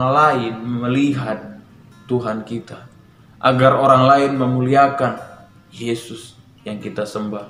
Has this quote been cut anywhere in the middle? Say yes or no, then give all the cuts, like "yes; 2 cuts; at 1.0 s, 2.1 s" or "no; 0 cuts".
no; 0 cuts